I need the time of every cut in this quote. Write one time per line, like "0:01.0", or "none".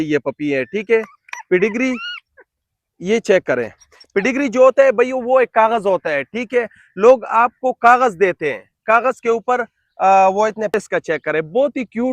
0:10.7